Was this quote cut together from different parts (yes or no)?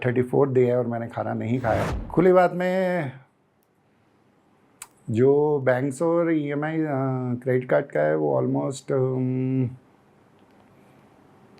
yes